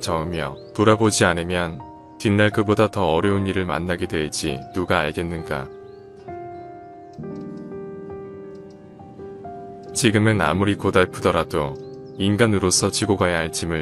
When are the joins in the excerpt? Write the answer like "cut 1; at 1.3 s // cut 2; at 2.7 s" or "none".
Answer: cut 1; at 5.8 s // cut 2; at 10.0 s